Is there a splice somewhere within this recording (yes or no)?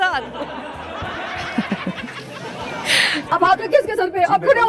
no